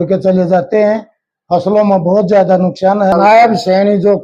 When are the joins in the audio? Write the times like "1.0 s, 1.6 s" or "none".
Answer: 3.1 s

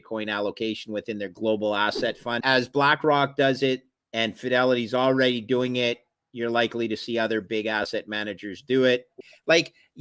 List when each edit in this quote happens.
1.3 s, 2.4 s, 9.2 s

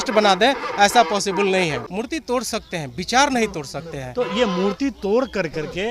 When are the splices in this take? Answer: 1.9 s

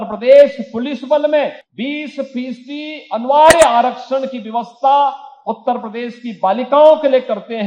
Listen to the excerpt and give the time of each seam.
1.6 s

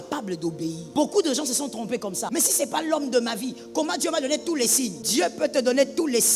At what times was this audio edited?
0.8 s, 2.2 s, 5.0 s

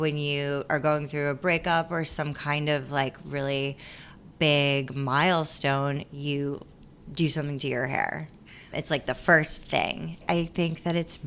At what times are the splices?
10.2 s

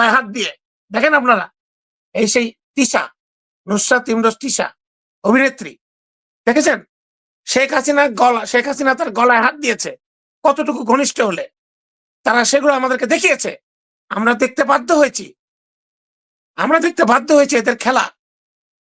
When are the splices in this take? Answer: none

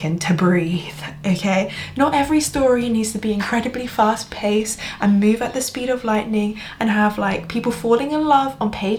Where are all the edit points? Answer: none

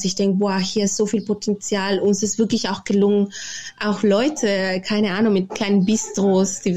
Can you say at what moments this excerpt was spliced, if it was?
none

